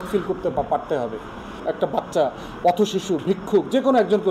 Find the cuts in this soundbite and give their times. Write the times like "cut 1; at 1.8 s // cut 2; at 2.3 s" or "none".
cut 1; at 1.6 s

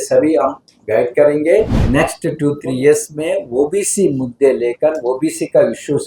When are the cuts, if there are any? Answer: cut 1; at 1.8 s

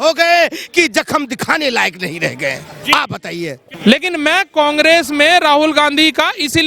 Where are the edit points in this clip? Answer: cut 1; at 3.7 s

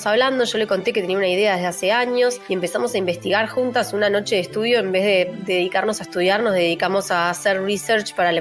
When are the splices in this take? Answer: cut 1; at 2.4 s // cut 2; at 5.4 s

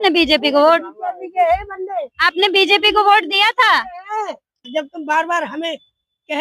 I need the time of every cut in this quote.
cut 1; at 4.6 s

